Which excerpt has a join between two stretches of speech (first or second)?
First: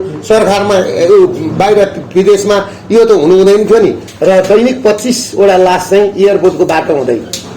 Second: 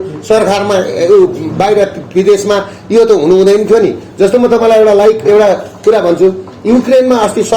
first